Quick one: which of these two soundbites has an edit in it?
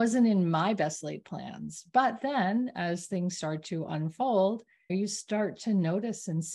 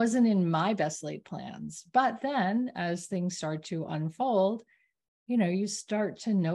first; 1 cut; at 4.9 s

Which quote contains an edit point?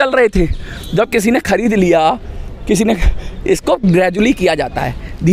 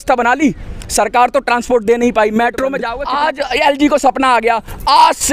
second; 1 cut; at 2.9 s

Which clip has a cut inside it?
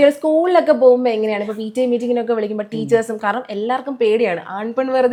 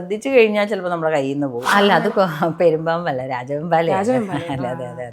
second; 1 cut; at 1.6 s

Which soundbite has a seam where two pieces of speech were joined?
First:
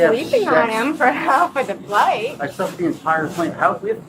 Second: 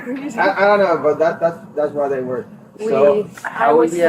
second; 1 cut; at 2.6 s

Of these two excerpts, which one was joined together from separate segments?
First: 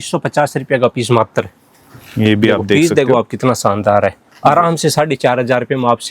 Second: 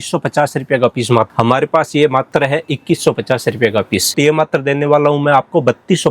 second; 2 cuts; at 1.3 s, 4.1 s

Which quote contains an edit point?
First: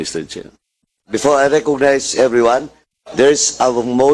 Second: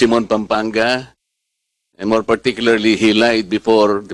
first; 1 cut; at 1.0 s

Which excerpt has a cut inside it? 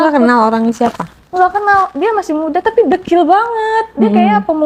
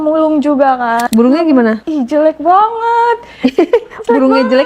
second; 2 cuts; at 1.1 s, 1.8 s

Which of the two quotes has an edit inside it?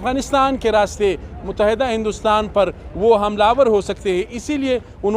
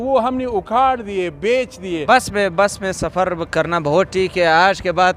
second; 1 cut; at 2.0 s

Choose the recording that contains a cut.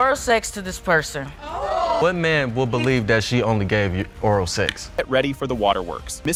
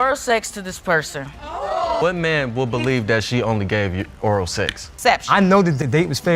second; 1 cut; at 5.0 s

